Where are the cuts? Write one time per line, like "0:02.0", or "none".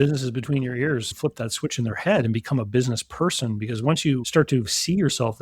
0:01.1